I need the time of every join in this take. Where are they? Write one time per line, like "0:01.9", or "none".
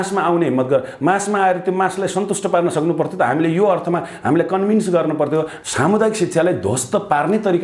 0:05.6